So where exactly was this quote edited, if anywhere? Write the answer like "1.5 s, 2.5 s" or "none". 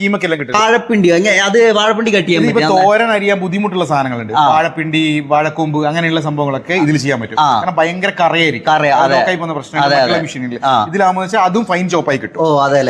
none